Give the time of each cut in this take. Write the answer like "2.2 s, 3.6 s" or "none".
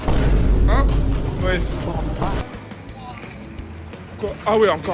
2.4 s